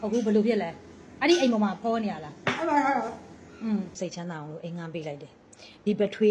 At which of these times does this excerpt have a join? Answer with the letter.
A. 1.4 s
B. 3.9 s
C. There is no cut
B